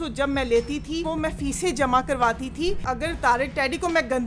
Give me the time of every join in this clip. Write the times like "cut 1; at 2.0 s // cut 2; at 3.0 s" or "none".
cut 1; at 1.1 s // cut 2; at 2.8 s